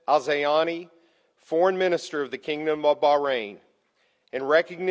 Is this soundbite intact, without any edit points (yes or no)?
yes